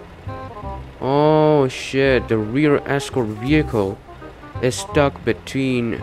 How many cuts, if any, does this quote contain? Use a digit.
0